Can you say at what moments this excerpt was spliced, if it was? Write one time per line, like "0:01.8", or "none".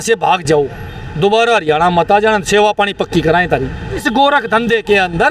0:04.1